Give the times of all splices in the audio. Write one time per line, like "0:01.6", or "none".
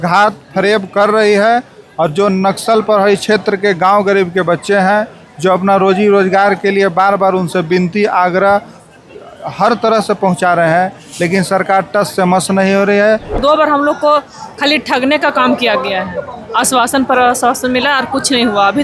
0:13.4